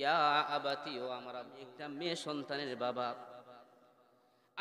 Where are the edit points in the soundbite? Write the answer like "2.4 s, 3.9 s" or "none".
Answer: 1.6 s